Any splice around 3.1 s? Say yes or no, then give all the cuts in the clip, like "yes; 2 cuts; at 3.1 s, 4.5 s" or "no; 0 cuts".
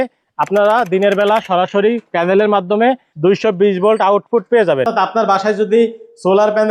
yes; 2 cuts; at 3.1 s, 4.9 s